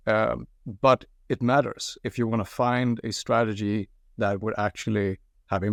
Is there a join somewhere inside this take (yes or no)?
no